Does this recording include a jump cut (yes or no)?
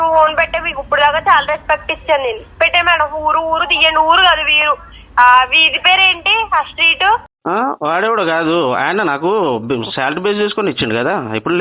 yes